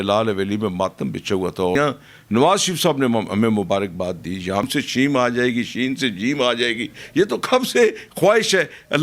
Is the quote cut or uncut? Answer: cut